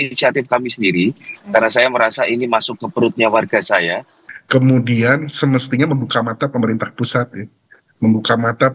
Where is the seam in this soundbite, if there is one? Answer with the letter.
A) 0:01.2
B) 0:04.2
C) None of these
B